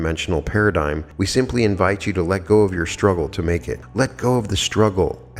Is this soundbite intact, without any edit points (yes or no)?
no